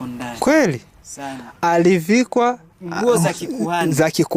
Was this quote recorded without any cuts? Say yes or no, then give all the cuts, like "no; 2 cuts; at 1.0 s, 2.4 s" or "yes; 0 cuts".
yes; 0 cuts